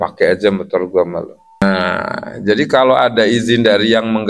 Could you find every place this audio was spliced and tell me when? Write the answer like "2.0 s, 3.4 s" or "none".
1.6 s